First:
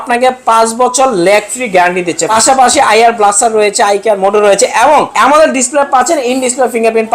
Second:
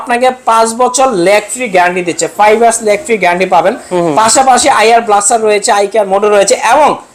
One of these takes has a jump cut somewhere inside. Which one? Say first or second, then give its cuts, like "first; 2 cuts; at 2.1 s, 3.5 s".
first; 2 cuts; at 2.3 s, 5.1 s